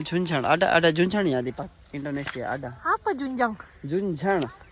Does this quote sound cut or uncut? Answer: uncut